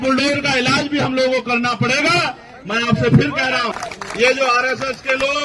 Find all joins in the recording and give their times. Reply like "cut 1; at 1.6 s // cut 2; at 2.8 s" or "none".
cut 1; at 3.8 s